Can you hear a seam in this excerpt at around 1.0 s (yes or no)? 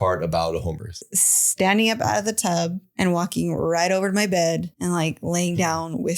yes